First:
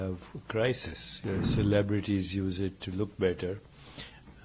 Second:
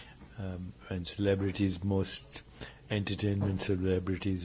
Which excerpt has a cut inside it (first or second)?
first